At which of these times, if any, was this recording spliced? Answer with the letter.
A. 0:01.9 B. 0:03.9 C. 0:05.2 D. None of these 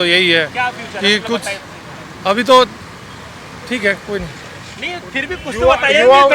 D